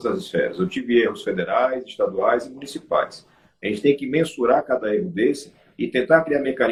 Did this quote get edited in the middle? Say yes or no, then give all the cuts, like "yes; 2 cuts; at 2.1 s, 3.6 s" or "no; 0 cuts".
no; 0 cuts